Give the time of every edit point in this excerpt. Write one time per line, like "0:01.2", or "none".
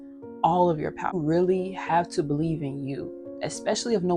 0:01.2